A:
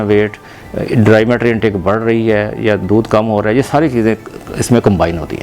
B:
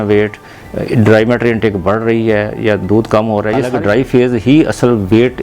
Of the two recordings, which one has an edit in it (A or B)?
B